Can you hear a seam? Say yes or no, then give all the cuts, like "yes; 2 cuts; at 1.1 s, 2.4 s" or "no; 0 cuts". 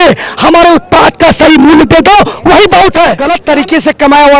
yes; 1 cut; at 3.2 s